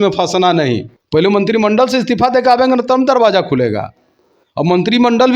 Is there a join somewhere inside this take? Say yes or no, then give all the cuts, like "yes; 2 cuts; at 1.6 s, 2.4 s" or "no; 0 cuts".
yes; 1 cut; at 0.9 s